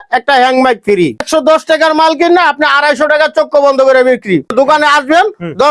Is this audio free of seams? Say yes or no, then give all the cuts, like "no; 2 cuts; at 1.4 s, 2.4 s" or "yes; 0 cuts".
no; 2 cuts; at 1.2 s, 4.5 s